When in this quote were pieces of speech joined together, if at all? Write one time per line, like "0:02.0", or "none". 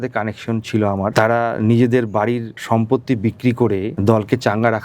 0:01.1
0:02.5
0:03.9